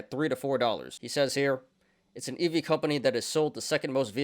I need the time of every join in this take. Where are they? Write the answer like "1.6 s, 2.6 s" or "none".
1.0 s